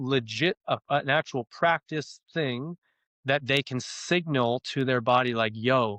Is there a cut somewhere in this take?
no; 0 cuts

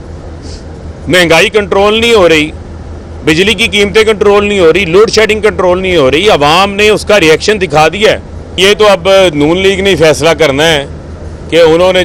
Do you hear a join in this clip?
yes; 1 cut; at 8.6 s

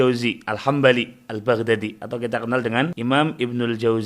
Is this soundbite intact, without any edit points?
no; 1 cut; at 2.9 s

